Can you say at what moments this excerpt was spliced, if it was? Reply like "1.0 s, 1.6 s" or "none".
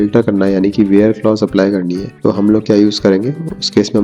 2.0 s

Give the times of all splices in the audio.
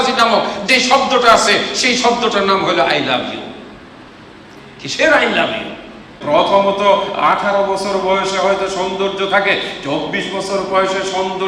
6.1 s

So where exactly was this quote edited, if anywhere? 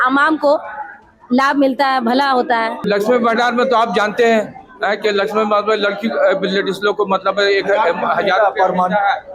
2.8 s

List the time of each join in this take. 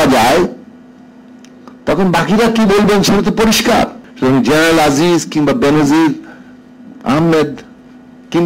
4.0 s

